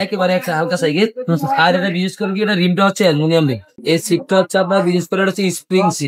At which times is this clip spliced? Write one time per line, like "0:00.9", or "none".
0:03.7